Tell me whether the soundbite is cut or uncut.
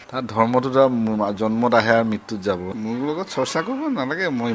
cut